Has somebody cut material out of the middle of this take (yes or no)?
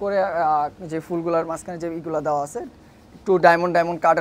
no